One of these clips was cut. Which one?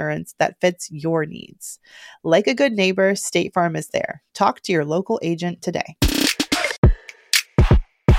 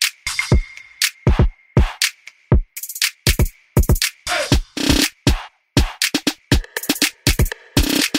first; 1 cut; at 6.7 s

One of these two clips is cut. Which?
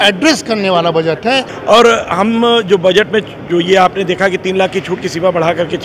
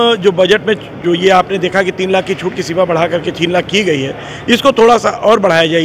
first; 1 cut; at 1.5 s

